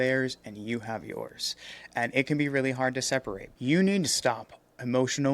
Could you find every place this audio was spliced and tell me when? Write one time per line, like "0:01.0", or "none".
0:03.4

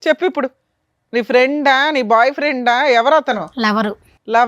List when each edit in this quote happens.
none

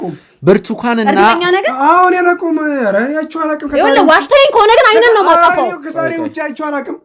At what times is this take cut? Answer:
none

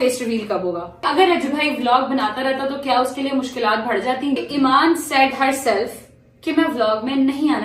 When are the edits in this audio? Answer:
0:01.0
0:04.4

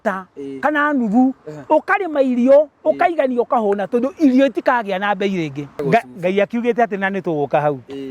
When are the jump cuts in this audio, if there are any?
0:05.7

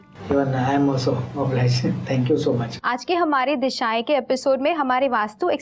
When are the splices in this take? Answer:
0:02.7

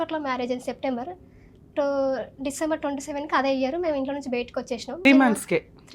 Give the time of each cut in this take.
0:05.1

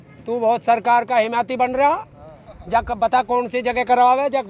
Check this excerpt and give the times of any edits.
none

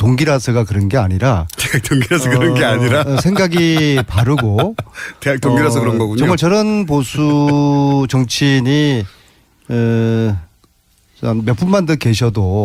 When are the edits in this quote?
none

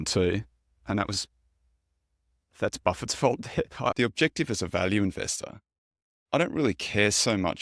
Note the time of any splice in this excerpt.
0:03.9

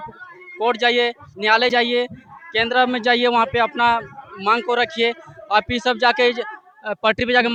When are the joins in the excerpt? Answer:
none

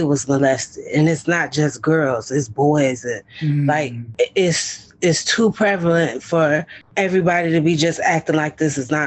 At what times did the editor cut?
0:04.0
0:06.8

